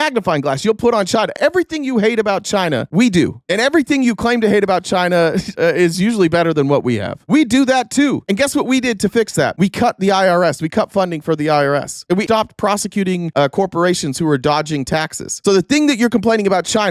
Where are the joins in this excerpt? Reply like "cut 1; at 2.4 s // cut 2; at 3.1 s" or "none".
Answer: cut 1; at 1.3 s // cut 2; at 12.1 s